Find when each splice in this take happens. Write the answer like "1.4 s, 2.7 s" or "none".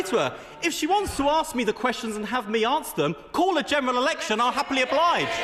none